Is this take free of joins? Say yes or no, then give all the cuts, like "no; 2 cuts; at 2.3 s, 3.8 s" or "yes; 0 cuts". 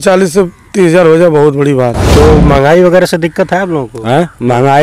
no; 1 cut; at 2.0 s